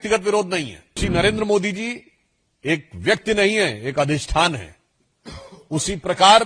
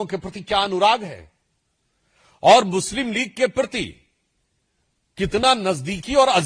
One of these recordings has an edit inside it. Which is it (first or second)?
first